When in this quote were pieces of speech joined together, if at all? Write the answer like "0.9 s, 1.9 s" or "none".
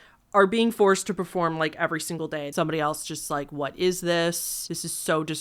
2.5 s